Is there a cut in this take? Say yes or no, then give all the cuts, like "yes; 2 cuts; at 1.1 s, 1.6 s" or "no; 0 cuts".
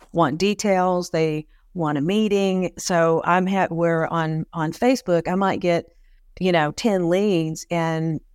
no; 0 cuts